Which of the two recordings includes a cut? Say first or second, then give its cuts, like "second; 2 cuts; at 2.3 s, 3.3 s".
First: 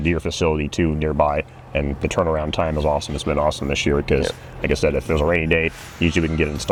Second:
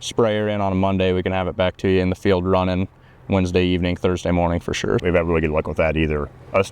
second; 1 cut; at 5.0 s